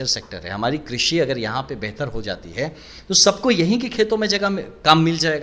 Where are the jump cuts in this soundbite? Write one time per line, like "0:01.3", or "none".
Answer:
none